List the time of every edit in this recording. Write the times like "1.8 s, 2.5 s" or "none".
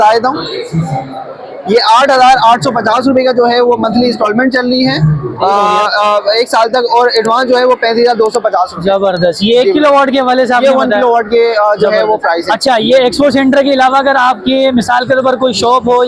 none

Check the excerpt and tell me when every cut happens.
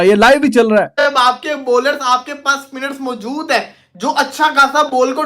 1.1 s

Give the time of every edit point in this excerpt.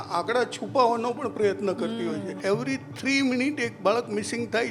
2.3 s

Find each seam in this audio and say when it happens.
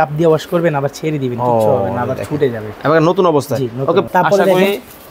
4.0 s

